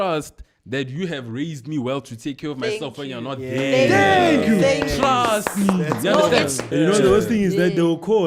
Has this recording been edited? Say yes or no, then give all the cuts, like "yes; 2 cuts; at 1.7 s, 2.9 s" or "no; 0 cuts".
yes; 1 cut; at 6.7 s